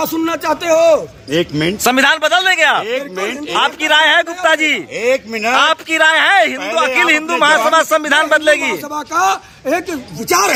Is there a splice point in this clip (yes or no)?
no